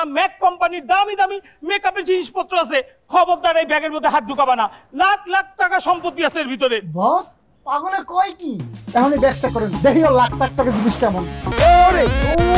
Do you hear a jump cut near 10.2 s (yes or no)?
no